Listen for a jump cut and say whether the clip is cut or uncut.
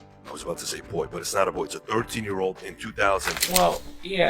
cut